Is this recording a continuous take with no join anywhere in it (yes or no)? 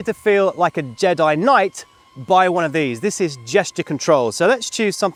yes